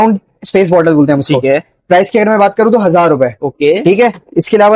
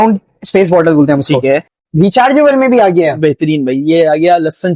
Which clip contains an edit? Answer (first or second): second